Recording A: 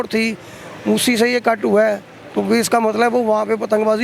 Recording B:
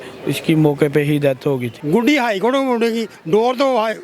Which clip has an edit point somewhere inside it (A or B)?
B